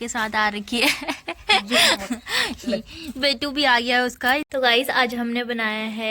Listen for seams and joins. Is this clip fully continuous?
no; 1 cut; at 4.5 s

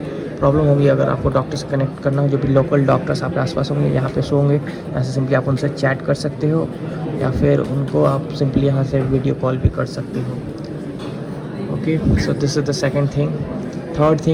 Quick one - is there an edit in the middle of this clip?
no; 0 cuts

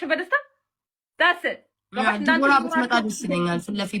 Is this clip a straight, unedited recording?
yes; 0 cuts

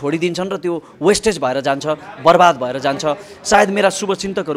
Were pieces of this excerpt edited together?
no; 0 cuts

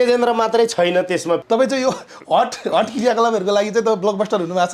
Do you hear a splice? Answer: yes; 1 cut; at 1.4 s

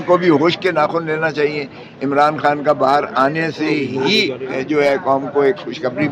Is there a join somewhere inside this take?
no; 0 cuts

